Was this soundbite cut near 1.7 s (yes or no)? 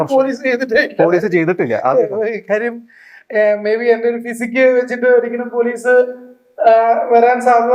no